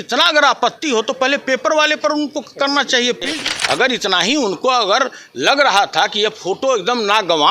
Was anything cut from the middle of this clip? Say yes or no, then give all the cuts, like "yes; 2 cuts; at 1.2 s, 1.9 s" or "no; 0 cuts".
yes; 1 cut; at 3.3 s